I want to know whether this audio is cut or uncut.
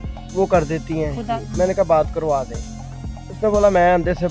cut